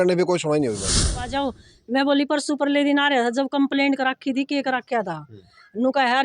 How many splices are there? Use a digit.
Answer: 1